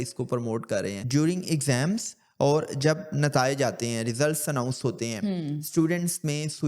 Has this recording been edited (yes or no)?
yes